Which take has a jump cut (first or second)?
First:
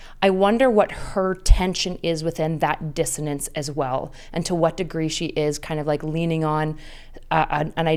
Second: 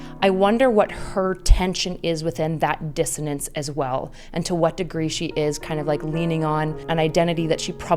second